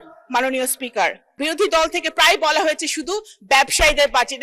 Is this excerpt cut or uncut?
cut